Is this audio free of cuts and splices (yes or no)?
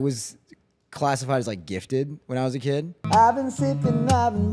no